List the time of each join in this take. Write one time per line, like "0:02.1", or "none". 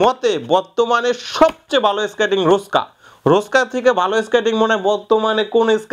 none